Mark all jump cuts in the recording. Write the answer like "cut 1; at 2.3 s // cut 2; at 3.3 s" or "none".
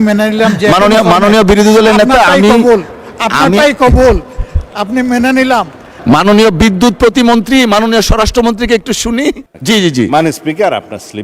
cut 1; at 5.9 s // cut 2; at 9.5 s